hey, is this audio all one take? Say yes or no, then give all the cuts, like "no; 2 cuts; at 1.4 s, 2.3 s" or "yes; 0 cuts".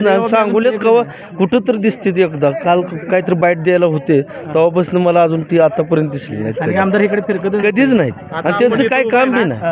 yes; 0 cuts